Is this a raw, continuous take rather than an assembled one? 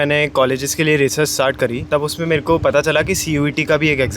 no; 1 cut; at 1.8 s

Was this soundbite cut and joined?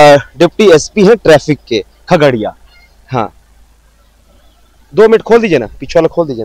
no; 0 cuts

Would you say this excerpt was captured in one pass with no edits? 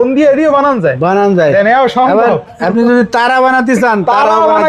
yes; 0 cuts

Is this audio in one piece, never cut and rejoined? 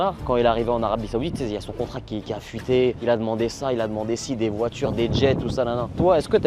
yes; 0 cuts

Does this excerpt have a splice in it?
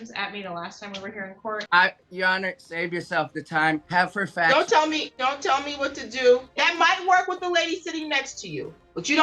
yes; 4 cuts; at 1.6 s, 3.8 s, 5.1 s, 6.5 s

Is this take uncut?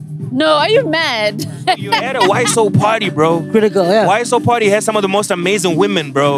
no; 1 cut; at 2.1 s

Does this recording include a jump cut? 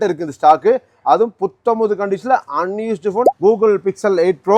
yes; 1 cut; at 3.3 s

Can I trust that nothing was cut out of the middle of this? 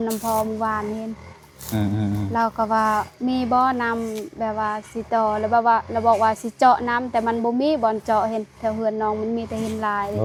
yes; 0 cuts

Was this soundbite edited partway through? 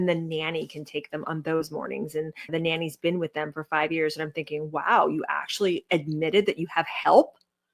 yes; 1 cut; at 1.3 s

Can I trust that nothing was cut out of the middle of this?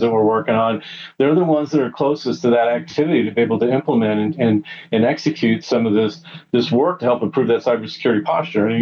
yes; 0 cuts

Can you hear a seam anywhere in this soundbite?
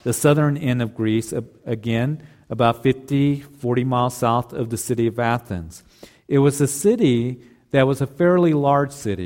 no; 0 cuts

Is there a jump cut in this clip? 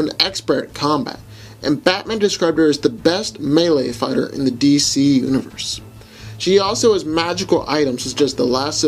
yes; 1 cut; at 5.9 s

